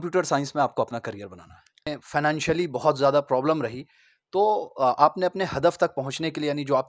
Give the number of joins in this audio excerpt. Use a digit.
1